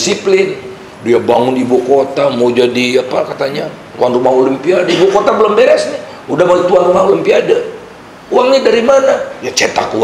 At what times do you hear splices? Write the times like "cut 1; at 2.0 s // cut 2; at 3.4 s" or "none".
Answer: none